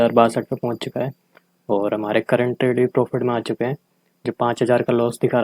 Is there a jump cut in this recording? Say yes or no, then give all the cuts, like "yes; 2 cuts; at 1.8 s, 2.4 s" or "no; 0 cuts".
no; 0 cuts